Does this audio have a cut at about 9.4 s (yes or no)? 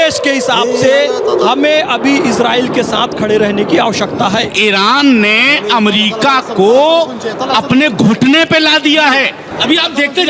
yes